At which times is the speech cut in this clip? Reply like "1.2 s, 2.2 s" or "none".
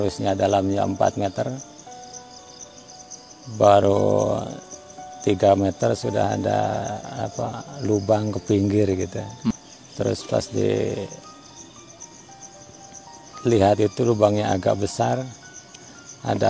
9.5 s